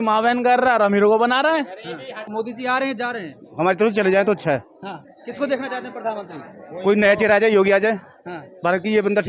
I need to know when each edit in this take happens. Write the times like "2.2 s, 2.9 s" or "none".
2.2 s